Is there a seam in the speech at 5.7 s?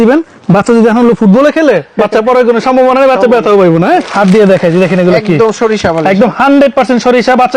no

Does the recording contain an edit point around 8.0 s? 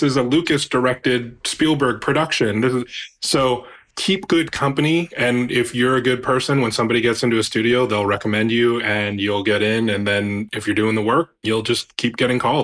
no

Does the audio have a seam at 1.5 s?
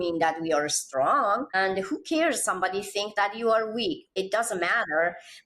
yes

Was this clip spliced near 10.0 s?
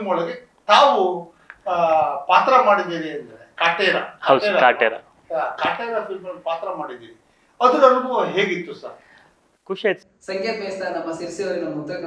yes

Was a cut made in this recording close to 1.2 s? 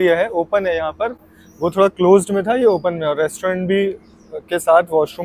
no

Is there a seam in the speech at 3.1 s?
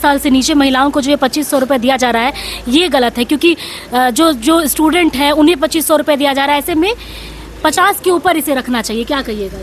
no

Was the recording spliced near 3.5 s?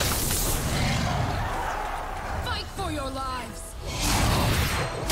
no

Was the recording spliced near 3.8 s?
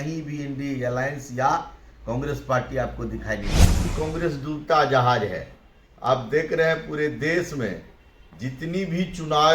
yes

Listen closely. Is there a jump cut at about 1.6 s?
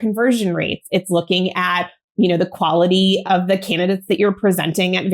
no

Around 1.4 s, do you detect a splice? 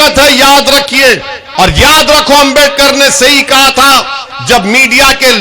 yes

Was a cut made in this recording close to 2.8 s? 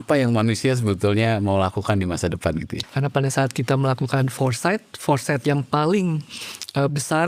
yes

